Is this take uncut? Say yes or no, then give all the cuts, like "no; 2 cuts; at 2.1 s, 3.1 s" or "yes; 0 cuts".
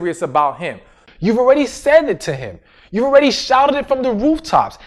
no; 1 cut; at 1.0 s